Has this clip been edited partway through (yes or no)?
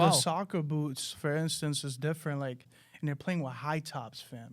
yes